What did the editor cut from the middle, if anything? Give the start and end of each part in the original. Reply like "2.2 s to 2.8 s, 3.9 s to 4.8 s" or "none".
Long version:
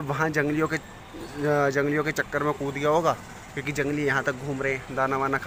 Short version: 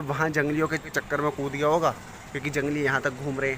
1.0 s to 2.2 s

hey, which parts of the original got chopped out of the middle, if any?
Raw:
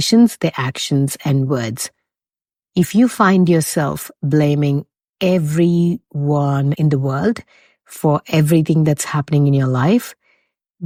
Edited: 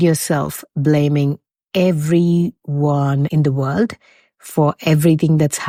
none

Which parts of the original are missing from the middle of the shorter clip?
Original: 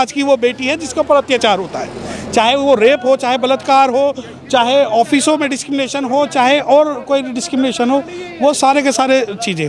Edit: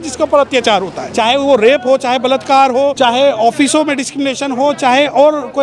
1.8 s to 2.2 s, 4.1 s to 4.5 s

